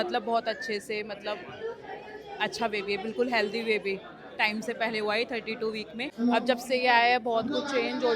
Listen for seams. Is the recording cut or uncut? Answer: cut